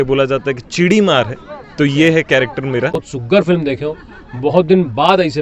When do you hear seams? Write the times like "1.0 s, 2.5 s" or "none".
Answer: 3.1 s